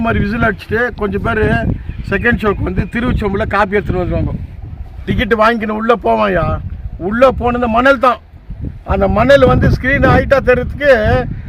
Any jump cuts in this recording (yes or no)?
yes